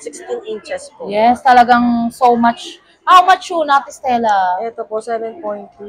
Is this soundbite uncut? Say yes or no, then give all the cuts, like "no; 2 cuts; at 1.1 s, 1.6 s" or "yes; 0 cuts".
yes; 0 cuts